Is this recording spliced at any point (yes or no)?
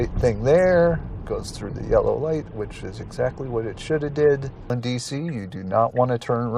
yes